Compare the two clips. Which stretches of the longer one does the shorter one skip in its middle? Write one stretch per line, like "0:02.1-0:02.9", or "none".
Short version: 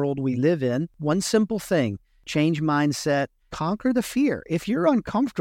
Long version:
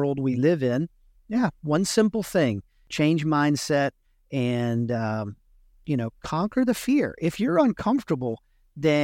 0:00.9-0:01.6
0:04.1-0:06.2